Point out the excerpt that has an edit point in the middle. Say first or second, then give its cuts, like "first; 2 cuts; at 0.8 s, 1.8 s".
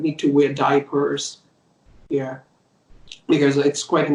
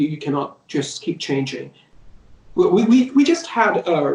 second; 1 cut; at 1.9 s